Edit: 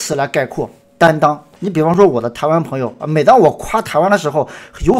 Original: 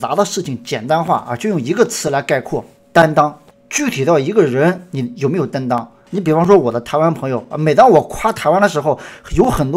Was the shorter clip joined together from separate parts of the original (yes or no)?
yes